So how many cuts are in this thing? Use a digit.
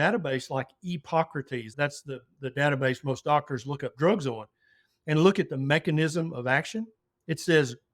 1